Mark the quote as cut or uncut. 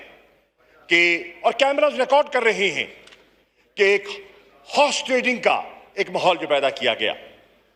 uncut